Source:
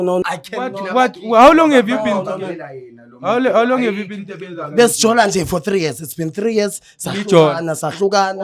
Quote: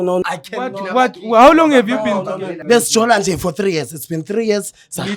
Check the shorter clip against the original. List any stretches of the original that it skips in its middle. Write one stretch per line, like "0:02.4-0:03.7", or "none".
0:02.5-0:04.6